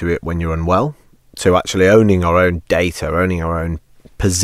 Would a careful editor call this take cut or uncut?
uncut